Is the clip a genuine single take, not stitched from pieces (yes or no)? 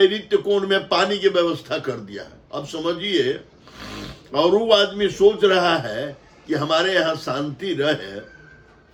yes